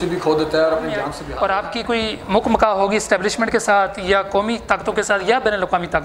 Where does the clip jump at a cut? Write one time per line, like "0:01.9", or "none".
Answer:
0:01.2